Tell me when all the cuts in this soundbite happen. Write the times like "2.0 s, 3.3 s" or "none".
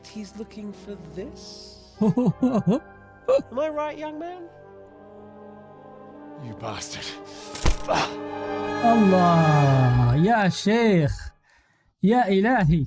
none